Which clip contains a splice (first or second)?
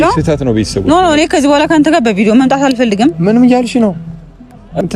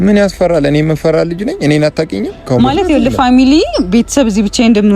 second